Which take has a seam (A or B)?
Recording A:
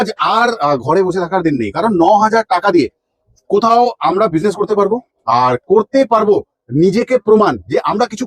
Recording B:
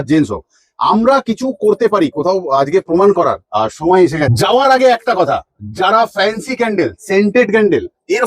B